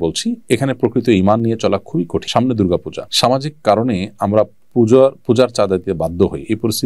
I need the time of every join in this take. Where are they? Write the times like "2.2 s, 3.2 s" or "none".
2.2 s, 3.0 s